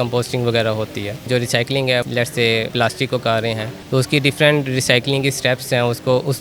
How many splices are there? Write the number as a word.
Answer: three